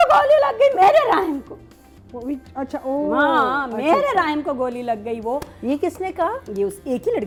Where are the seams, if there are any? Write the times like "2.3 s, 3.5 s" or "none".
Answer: none